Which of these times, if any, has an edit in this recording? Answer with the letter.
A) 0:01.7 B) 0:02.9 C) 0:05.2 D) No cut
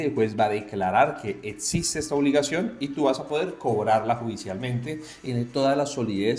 C